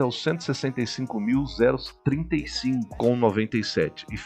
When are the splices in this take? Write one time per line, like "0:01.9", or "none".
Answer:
0:02.9